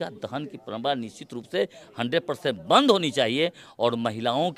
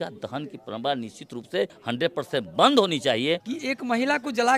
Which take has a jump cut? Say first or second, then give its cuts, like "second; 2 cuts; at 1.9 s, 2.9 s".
second; 2 cuts; at 1.8 s, 3.5 s